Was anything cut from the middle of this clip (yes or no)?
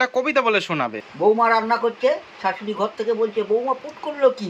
yes